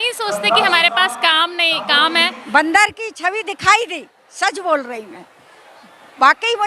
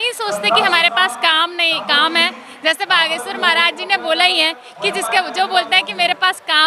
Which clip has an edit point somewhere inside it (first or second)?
first